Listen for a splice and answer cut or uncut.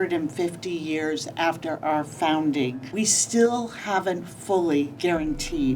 cut